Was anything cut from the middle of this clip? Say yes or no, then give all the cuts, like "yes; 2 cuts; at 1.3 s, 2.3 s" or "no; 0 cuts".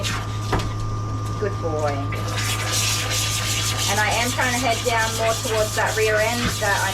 no; 0 cuts